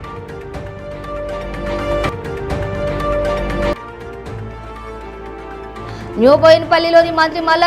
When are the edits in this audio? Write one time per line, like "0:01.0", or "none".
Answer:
0:01.0